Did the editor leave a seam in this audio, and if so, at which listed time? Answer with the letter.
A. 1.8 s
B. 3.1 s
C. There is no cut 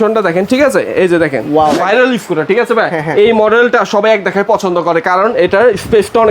A